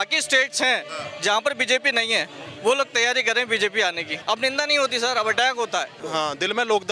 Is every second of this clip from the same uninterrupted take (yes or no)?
no